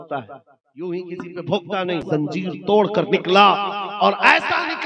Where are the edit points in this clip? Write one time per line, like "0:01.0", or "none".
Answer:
0:02.0